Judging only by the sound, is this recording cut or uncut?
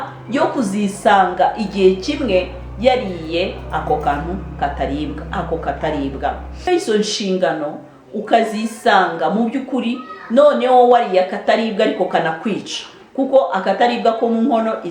cut